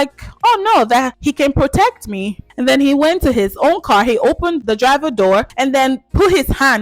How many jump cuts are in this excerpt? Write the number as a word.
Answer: three